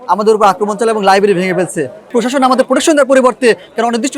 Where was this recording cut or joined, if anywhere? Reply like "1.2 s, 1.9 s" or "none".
2.1 s